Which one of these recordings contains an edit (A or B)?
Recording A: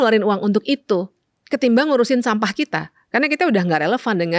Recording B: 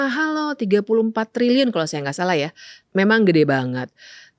B